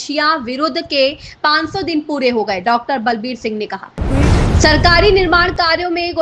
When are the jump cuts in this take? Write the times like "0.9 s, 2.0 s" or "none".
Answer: 4.0 s